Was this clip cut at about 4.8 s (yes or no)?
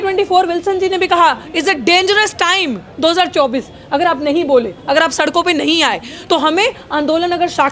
no